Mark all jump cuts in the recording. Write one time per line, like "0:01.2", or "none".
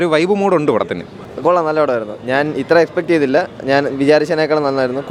none